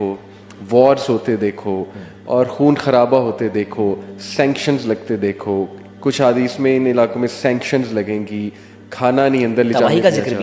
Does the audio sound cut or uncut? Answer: uncut